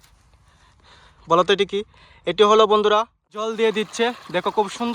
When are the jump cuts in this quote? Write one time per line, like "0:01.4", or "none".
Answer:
0:03.5